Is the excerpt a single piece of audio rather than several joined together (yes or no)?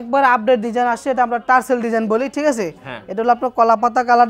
yes